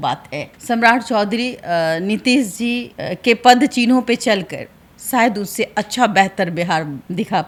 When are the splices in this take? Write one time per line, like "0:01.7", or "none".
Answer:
none